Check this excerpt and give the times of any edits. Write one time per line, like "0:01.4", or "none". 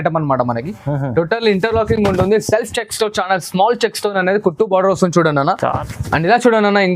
0:05.8